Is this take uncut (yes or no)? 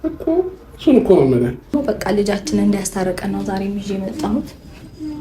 no